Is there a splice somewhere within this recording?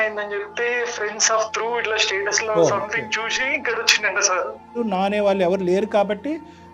yes; 1 cut; at 4.8 s

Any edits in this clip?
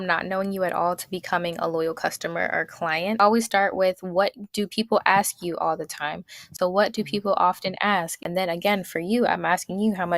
yes; 3 cuts; at 3.2 s, 6.5 s, 8.2 s

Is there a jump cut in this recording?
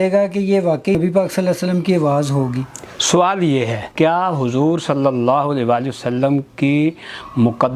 yes; 2 cuts; at 0.9 s, 3.8 s

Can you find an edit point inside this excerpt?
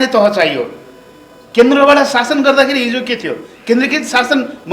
no; 0 cuts

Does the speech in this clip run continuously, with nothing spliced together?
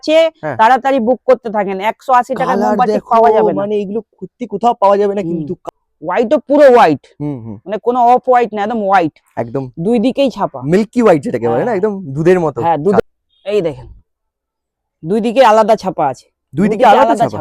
no; 2 cuts; at 5.6 s, 13.0 s

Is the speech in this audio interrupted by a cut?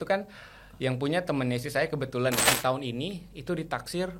yes; 1 cut; at 2.5 s

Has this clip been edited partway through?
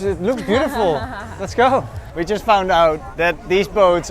yes; 2 cuts; at 2.0 s, 3.1 s

